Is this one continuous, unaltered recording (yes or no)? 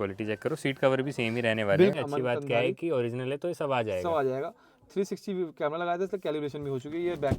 no